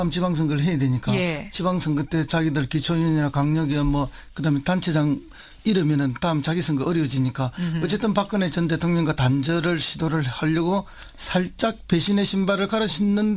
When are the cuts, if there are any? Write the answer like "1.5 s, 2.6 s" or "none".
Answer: 10.4 s